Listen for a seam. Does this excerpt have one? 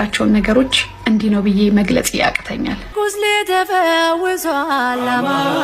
no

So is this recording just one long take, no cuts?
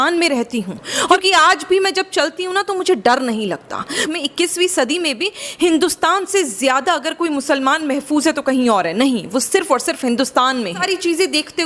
no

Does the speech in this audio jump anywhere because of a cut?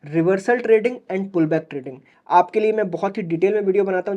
yes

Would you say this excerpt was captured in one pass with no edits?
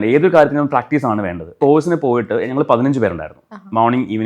no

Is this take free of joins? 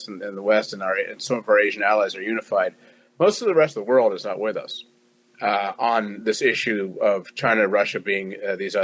no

